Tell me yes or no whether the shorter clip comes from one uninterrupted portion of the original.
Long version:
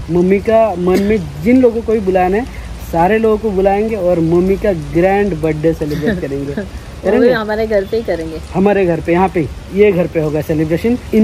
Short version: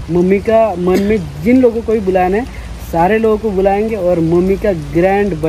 yes